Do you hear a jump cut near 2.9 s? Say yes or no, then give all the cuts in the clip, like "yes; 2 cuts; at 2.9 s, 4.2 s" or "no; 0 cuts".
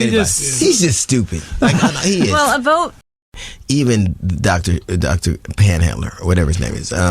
yes; 1 cut; at 2.9 s